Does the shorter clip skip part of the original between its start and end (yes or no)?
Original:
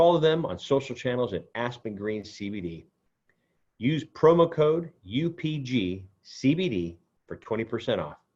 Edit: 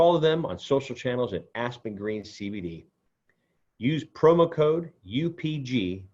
no